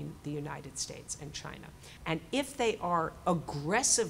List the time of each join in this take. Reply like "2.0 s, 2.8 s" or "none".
1.9 s